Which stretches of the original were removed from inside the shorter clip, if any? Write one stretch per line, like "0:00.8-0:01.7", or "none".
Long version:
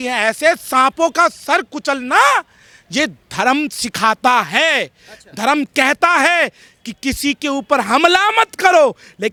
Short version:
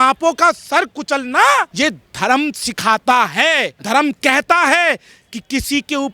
0:02.5-0:02.9
0:04.9-0:05.3